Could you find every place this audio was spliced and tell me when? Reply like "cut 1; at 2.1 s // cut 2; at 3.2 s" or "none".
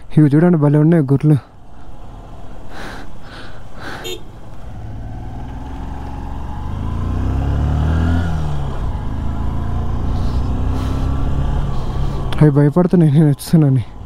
none